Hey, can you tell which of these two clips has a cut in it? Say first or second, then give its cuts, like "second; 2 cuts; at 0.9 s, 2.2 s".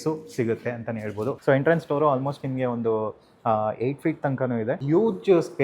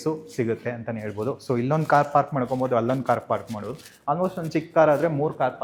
first; 2 cuts; at 1.4 s, 4.8 s